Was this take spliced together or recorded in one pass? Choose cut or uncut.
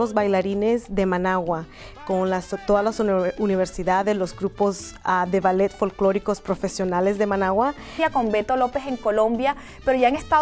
uncut